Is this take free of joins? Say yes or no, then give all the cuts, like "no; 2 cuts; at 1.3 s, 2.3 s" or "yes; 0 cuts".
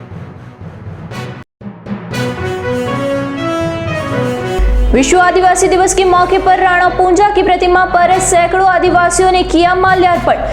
no; 1 cut; at 1.2 s